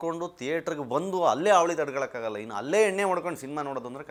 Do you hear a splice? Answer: no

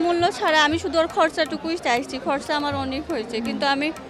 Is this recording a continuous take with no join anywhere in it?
yes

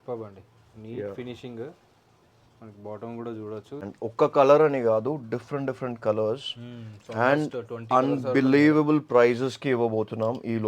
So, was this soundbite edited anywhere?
yes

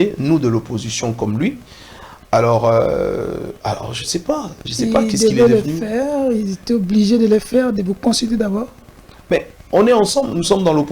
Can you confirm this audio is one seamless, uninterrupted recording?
yes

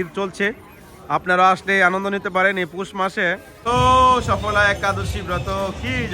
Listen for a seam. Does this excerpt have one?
yes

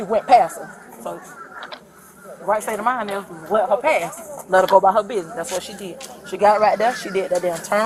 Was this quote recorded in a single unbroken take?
yes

